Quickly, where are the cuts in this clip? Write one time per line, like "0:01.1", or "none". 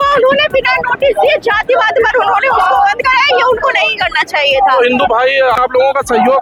none